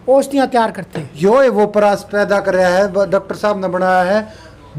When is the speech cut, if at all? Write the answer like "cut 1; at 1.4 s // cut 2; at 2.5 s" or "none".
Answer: cut 1; at 1.2 s